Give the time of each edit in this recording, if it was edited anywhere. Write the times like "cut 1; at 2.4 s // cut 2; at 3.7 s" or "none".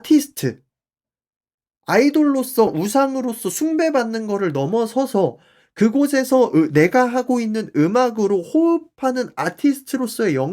none